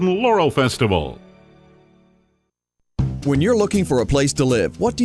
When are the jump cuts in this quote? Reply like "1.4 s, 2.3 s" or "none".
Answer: 2.9 s